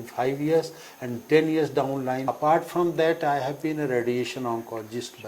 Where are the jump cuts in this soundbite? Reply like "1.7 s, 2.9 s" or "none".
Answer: 2.3 s

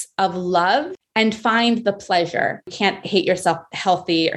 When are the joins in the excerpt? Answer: 1.0 s, 2.7 s

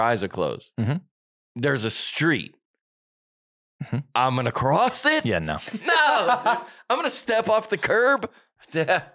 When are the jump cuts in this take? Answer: none

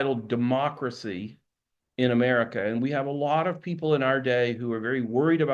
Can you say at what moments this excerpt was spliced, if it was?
none

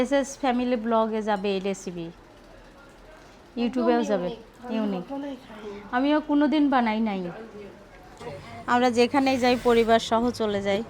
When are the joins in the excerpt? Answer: 8.3 s

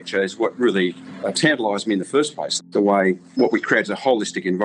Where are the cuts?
2.5 s, 3.3 s

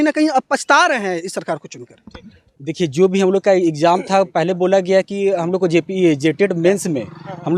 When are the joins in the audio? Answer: none

